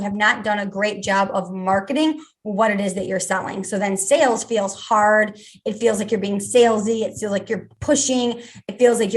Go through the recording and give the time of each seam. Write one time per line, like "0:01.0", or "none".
0:07.7